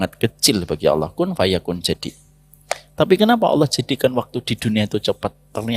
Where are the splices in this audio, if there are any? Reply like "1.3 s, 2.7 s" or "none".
none